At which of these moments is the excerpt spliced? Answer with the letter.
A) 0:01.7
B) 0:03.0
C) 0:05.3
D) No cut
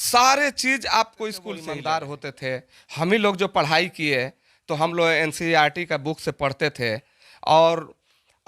A